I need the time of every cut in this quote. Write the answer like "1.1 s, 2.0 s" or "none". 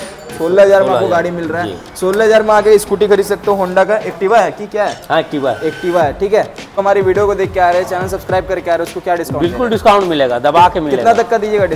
6.8 s